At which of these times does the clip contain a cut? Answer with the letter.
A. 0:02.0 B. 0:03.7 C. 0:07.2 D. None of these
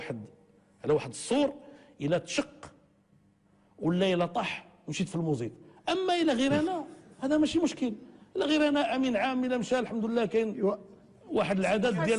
A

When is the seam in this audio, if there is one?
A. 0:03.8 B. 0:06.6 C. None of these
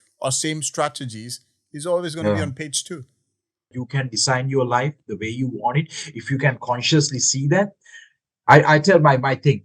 A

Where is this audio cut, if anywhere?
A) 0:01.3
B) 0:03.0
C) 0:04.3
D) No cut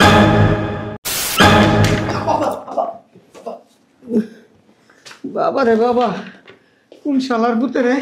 A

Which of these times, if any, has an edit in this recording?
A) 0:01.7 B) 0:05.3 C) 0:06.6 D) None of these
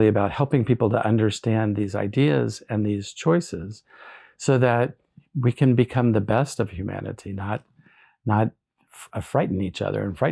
D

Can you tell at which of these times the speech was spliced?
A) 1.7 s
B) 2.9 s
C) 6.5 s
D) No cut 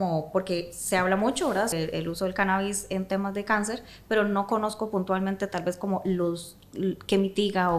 A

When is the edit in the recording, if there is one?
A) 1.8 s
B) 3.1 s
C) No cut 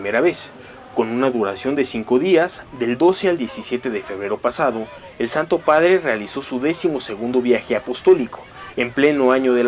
B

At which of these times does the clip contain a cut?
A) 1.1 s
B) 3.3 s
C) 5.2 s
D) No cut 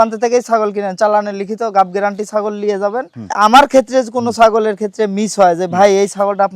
B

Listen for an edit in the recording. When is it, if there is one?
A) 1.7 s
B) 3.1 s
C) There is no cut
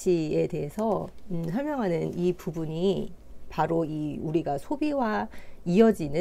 C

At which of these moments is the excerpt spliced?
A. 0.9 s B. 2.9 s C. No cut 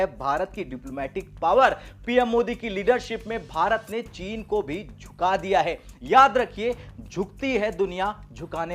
C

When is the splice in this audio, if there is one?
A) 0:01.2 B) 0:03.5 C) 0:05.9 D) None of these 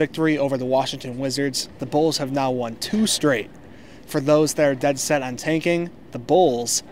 D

